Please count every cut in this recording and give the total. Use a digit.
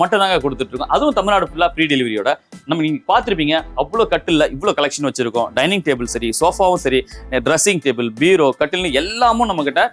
0